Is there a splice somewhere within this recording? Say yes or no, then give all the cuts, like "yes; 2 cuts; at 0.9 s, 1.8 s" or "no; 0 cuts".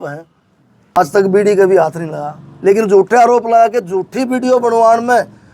yes; 1 cut; at 1.0 s